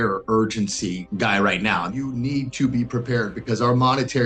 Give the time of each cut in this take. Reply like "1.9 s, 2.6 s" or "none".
1.0 s, 1.9 s